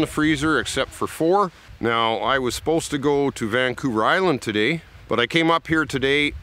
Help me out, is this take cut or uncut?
cut